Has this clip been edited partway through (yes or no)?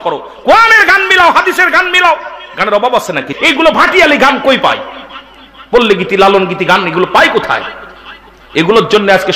yes